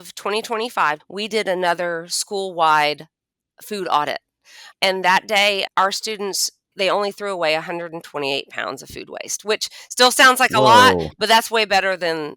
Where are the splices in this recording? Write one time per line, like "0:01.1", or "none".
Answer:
0:01.1
0:04.6
0:05.6
0:06.7